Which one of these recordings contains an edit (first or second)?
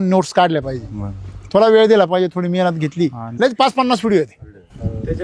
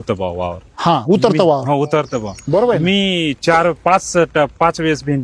first